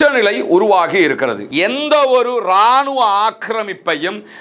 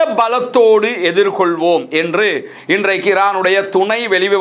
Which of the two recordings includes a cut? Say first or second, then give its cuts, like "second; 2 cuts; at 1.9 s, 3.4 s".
first; 1 cut; at 1.4 s